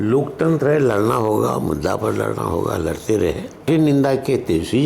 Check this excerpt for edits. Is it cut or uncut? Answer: cut